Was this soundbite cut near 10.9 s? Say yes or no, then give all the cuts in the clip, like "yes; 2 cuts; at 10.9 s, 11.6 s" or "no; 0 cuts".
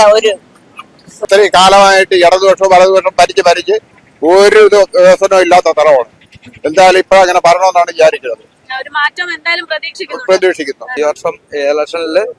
yes; 2 cuts; at 1.2 s, 10.9 s